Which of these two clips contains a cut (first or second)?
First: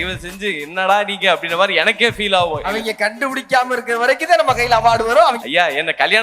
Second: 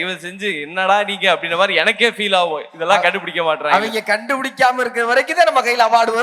first